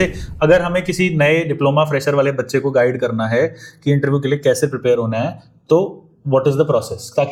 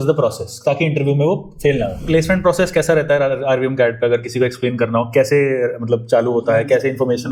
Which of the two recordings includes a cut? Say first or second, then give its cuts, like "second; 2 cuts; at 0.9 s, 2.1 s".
second; 1 cut; at 2.0 s